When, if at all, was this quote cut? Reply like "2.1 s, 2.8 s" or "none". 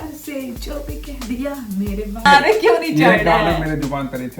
2.2 s